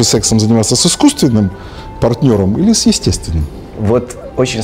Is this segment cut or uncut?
uncut